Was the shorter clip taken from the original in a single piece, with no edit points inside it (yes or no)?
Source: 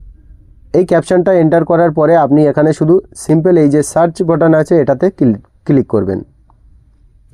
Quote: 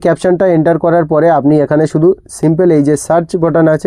yes